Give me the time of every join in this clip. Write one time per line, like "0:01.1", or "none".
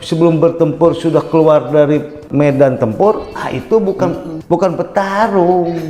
0:02.3
0:04.3